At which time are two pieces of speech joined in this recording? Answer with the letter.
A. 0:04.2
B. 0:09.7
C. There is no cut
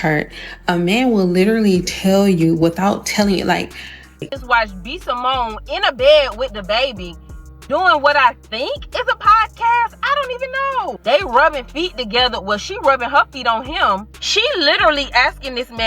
A